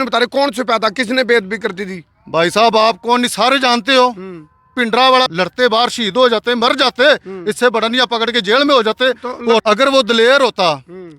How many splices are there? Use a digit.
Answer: 2